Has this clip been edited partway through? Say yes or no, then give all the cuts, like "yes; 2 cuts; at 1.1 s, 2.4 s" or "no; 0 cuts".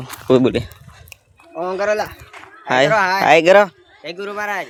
no; 0 cuts